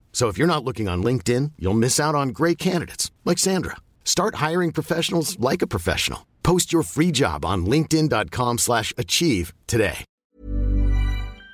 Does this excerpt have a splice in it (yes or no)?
yes